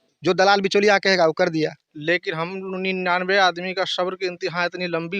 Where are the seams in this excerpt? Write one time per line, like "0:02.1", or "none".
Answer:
0:01.9